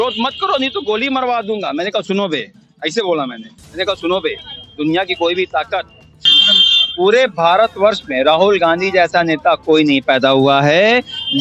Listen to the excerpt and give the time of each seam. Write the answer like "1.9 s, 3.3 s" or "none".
6.2 s